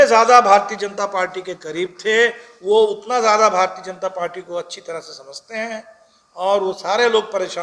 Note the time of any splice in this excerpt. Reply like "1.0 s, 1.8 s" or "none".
none